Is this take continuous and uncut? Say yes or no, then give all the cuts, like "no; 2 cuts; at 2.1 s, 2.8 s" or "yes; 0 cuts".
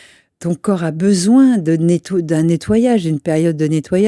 yes; 0 cuts